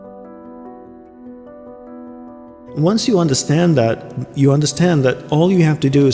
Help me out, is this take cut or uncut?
cut